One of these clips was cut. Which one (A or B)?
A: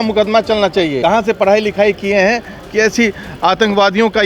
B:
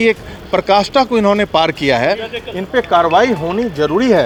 A